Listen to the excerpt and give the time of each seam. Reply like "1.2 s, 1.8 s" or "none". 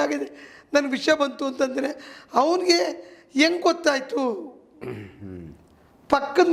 none